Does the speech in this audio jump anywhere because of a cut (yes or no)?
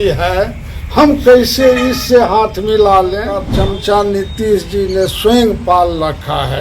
yes